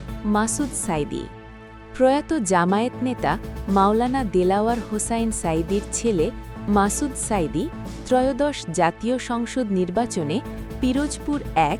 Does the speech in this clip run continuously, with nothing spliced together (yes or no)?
yes